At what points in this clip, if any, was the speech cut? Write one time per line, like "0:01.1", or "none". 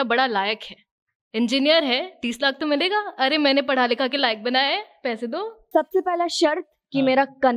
0:05.6